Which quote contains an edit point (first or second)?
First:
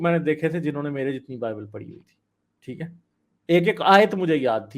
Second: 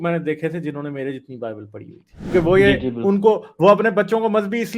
second